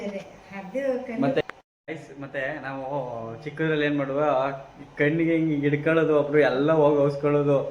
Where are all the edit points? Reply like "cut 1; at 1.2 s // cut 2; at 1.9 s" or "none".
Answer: cut 1; at 1.4 s